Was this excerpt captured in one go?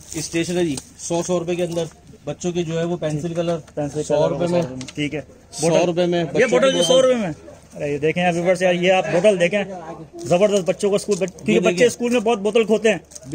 yes; 0 cuts

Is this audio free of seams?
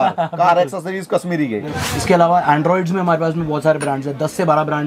no; 1 cut; at 1.8 s

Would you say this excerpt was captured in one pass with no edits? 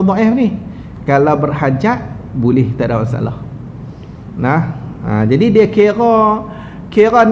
yes; 0 cuts

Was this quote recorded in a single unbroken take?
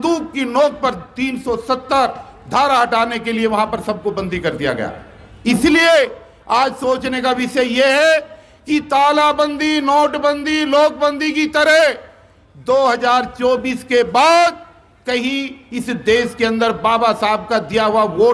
yes; 0 cuts

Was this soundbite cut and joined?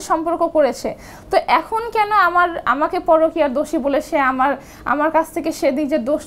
no; 0 cuts

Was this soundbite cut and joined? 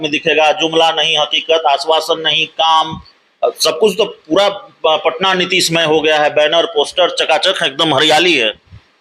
no; 0 cuts

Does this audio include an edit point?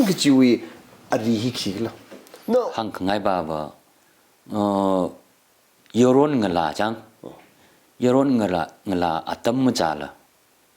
yes; 1 cut; at 2.7 s

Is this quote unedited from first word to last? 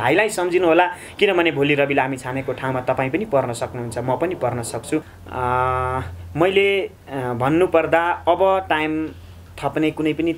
no; 1 cut; at 5.1 s

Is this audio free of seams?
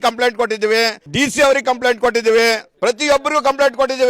no; 2 cuts; at 1.0 s, 2.7 s

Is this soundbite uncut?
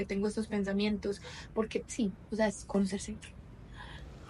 yes; 0 cuts

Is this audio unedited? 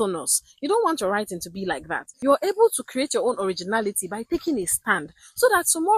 no; 1 cut; at 2.0 s

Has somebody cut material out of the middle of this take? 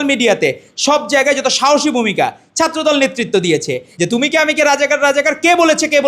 yes; 1 cut; at 3.9 s

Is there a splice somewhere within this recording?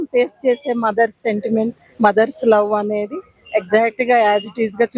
no; 0 cuts

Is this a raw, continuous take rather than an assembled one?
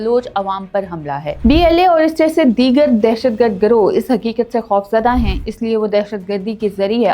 no; 1 cut; at 1.3 s

